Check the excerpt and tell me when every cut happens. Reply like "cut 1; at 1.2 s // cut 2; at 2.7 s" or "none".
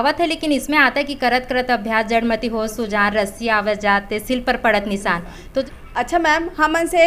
cut 1; at 5.6 s

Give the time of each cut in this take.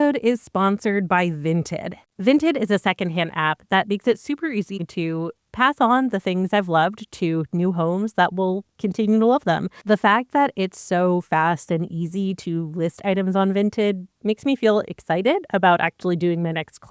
cut 1; at 2.0 s // cut 2; at 4.8 s // cut 3; at 9.7 s

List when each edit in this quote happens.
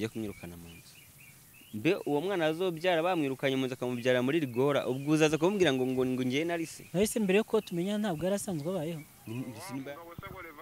cut 1; at 9.6 s

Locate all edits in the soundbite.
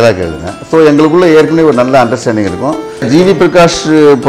cut 1; at 3.1 s

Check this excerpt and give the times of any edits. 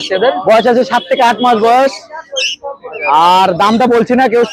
none

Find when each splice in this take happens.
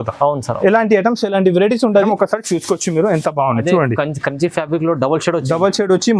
cut 1; at 2.1 s

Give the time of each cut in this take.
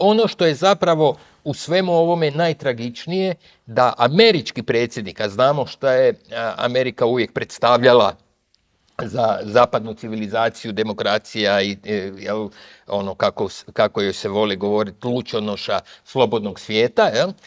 none

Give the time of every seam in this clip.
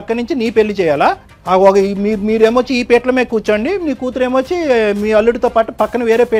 cut 1; at 1.3 s

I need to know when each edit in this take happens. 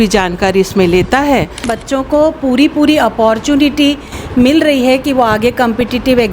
cut 1; at 1.7 s

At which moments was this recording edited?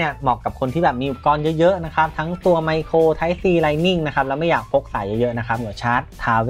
cut 1; at 5.6 s

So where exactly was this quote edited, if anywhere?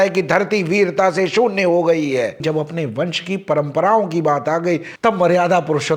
cut 1; at 2.4 s

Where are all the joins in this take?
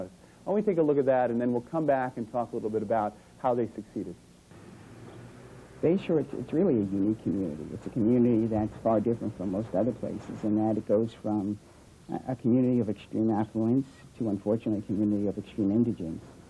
cut 1; at 4.5 s

